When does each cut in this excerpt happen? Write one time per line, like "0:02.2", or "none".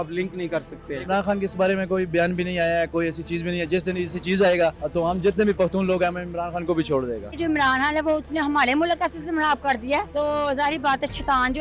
0:01.0
0:04.8
0:07.3
0:10.1